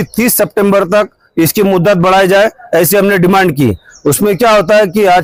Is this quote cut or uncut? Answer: uncut